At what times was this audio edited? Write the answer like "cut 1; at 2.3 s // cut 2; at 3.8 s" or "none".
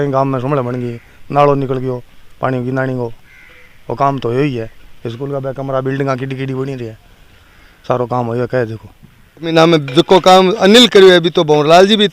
cut 1; at 9.5 s